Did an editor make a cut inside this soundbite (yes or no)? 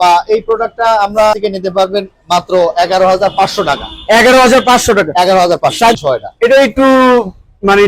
yes